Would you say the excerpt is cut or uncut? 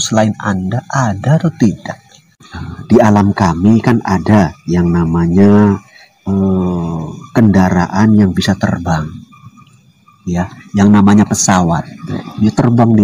cut